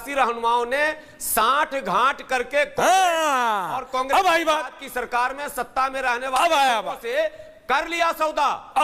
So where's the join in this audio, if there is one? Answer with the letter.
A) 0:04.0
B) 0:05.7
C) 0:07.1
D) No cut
D